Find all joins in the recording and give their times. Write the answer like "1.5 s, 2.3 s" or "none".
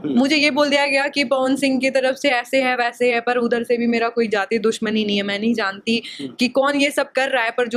none